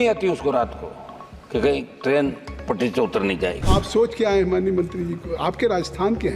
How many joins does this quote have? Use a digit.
1